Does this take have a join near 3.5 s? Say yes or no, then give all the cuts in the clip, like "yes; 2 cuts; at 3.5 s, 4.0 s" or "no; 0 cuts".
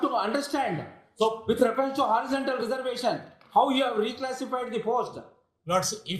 no; 0 cuts